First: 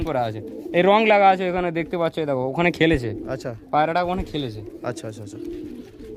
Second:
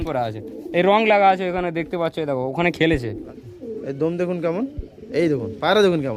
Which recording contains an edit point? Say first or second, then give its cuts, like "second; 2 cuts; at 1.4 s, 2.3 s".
second; 1 cut; at 3.3 s